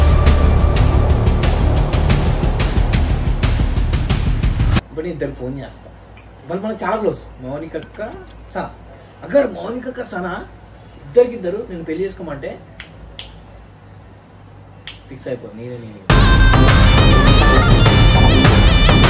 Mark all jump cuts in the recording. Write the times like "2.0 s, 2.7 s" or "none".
4.9 s